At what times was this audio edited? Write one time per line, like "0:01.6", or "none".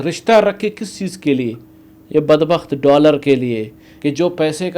0:03.9